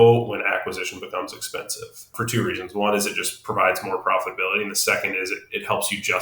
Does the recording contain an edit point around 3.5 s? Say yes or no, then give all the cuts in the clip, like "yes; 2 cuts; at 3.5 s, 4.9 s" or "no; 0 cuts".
no; 1 cut; at 2.1 s